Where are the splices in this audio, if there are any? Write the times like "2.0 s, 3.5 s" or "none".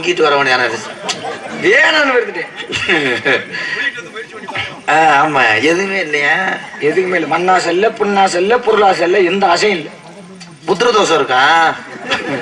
none